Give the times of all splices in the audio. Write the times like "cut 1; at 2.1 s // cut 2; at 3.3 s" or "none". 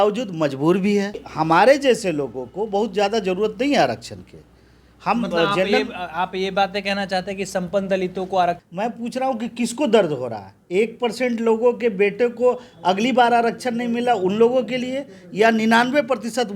cut 1; at 1.2 s // cut 2; at 8.7 s